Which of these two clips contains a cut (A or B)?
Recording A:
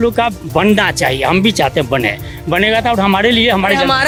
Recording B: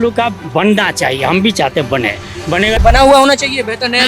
B